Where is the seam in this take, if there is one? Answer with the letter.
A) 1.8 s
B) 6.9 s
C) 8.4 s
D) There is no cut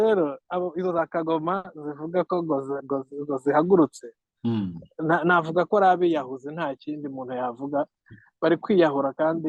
D